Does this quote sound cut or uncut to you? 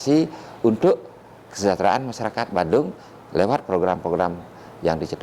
uncut